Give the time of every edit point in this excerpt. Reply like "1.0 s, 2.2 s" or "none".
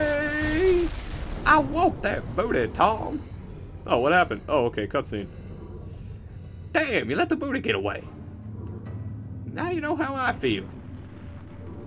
none